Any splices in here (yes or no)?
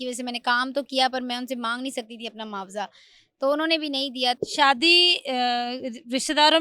yes